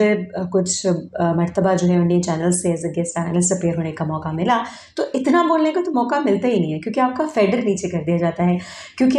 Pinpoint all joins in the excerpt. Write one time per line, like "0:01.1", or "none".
none